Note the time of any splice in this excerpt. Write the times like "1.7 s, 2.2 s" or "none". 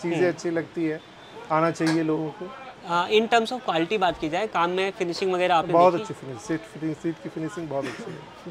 none